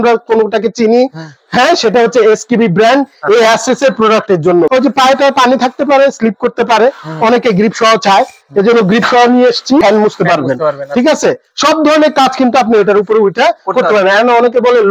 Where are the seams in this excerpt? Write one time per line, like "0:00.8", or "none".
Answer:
0:04.7
0:09.8